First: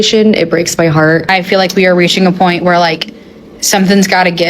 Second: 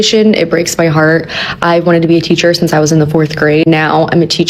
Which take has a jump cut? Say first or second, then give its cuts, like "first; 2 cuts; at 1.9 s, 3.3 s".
first; 1 cut; at 1.3 s